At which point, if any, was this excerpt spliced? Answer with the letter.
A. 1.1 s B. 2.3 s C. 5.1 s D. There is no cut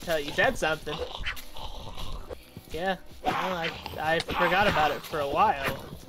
B